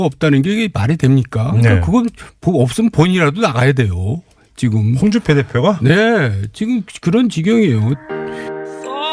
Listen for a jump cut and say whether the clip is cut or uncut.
cut